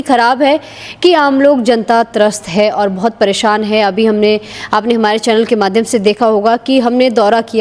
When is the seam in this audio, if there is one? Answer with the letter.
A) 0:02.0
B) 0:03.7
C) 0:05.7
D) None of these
D